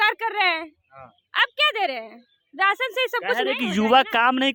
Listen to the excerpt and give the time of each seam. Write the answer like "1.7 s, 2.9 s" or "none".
none